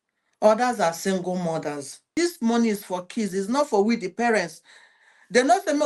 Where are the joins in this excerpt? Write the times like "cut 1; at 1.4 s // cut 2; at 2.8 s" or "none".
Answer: cut 1; at 2.1 s